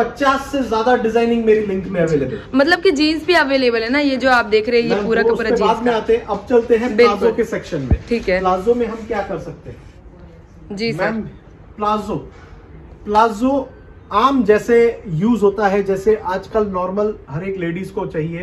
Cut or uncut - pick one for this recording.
uncut